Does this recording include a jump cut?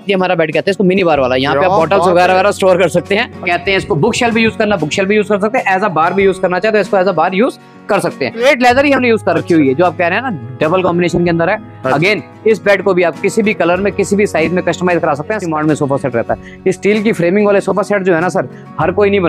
yes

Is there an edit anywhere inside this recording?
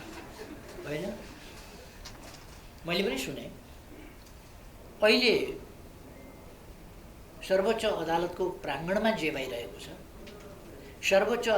yes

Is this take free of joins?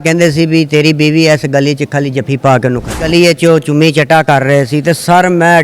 no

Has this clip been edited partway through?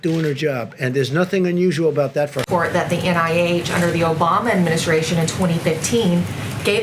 yes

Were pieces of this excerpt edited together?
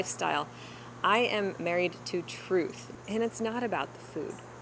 yes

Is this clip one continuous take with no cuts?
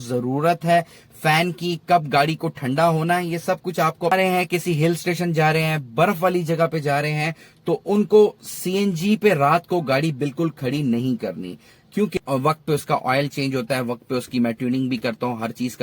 no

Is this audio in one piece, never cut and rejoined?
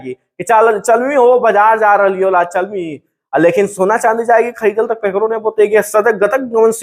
yes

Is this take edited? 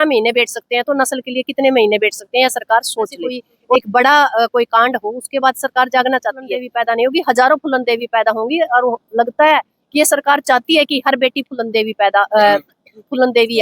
yes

